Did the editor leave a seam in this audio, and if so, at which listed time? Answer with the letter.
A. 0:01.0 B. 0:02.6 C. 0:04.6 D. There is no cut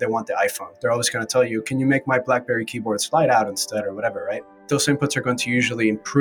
C